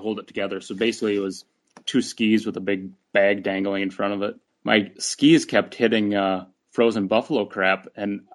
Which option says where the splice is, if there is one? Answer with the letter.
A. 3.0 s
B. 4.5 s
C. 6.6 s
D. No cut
B